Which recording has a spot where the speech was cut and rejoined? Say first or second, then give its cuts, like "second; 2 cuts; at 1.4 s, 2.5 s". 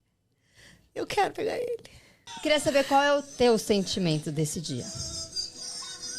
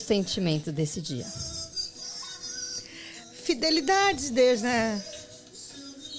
first; 1 cut; at 2.4 s